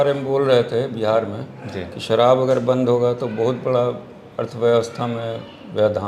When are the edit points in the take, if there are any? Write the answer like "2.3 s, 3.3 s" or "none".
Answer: none